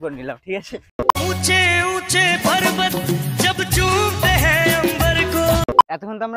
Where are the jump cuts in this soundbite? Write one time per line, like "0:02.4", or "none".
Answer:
0:01.2
0:05.6